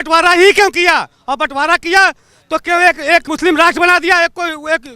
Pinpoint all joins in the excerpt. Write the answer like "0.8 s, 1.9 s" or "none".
3.3 s